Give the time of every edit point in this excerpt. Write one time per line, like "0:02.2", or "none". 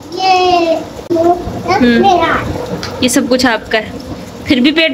0:01.0